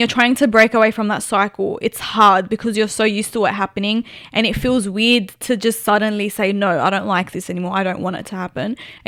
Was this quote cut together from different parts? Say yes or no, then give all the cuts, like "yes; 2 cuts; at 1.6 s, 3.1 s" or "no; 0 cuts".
no; 0 cuts